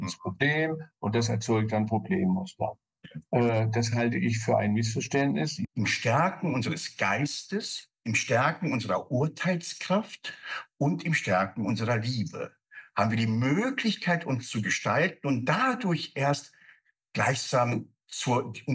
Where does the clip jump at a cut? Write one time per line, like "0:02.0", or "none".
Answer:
0:05.6